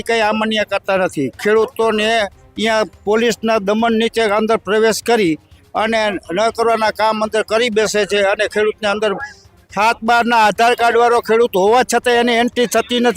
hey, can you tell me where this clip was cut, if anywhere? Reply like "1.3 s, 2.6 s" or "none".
none